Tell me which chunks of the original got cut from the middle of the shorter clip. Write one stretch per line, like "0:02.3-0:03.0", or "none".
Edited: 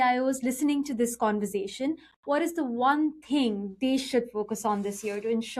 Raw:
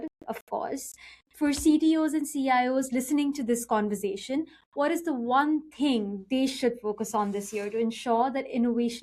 none